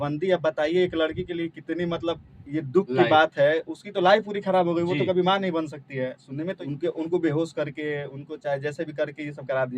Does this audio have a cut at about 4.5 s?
no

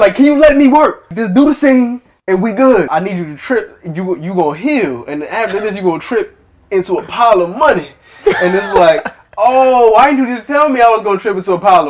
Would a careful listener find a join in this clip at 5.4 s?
no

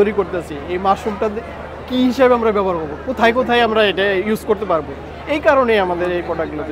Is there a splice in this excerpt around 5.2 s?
no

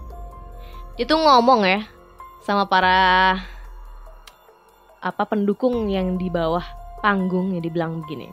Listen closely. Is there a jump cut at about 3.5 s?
no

